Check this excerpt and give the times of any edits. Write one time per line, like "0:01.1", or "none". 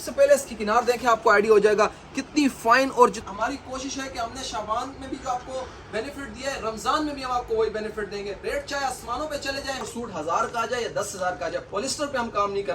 0:03.2
0:09.8